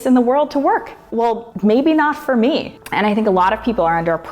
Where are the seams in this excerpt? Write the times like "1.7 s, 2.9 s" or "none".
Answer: 1.0 s, 2.7 s